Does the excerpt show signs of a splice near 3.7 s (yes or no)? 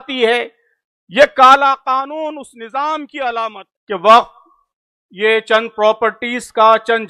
yes